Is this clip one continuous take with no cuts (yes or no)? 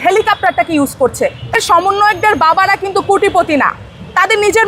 no